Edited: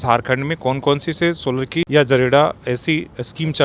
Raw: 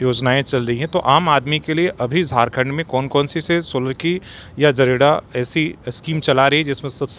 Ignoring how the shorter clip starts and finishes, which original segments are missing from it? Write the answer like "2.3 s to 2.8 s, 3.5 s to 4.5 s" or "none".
4.1 s to 4.5 s